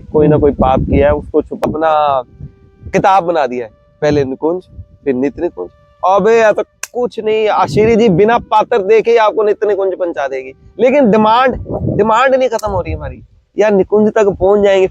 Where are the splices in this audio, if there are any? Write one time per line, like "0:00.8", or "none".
0:01.6

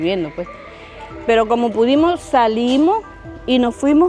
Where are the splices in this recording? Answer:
none

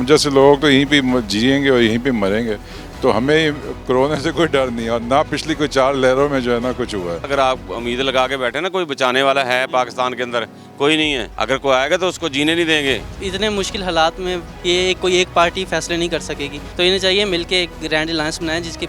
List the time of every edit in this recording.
0:07.3
0:11.3
0:13.1
0:16.6

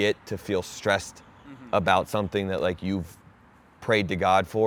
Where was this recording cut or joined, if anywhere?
none

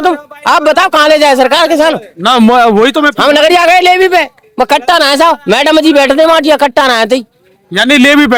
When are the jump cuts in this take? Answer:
none

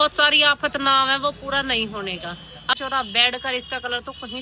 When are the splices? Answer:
0:02.8

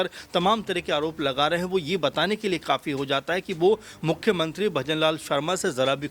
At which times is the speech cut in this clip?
none

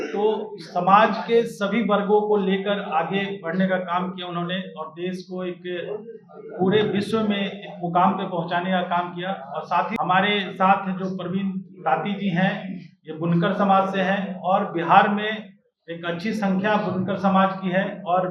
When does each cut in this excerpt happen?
0:09.9

